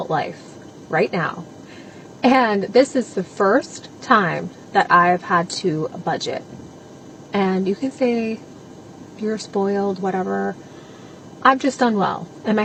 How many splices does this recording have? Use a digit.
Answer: 0